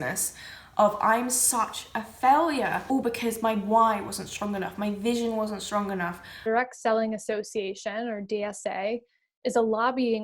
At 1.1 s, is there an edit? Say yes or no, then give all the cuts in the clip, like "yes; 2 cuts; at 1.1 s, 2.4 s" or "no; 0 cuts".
no; 2 cuts; at 2.8 s, 6.4 s